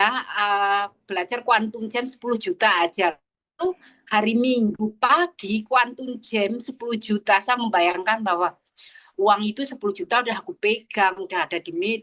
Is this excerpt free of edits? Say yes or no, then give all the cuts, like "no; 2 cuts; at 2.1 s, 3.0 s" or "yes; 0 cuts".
yes; 0 cuts